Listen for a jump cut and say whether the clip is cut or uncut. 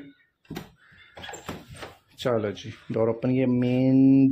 uncut